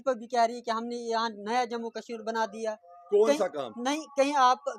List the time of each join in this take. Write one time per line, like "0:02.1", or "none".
none